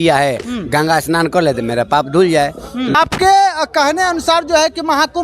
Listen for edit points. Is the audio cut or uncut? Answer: cut